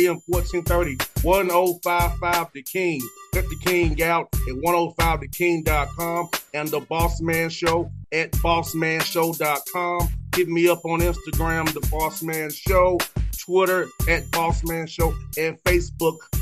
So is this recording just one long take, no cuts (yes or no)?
yes